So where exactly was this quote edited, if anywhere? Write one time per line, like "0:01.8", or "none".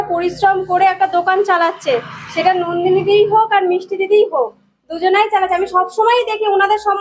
none